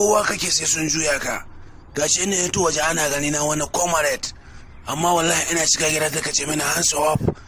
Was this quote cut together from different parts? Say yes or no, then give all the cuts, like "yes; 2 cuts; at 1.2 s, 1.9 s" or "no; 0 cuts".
no; 0 cuts